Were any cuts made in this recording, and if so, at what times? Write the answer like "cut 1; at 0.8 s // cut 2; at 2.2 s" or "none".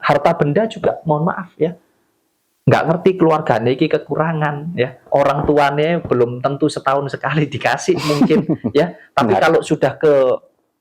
none